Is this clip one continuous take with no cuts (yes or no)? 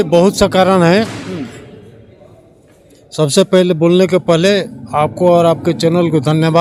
yes